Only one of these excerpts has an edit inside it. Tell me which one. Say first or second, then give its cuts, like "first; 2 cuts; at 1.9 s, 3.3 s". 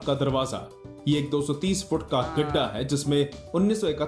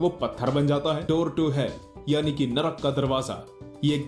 second; 1 cut; at 1.0 s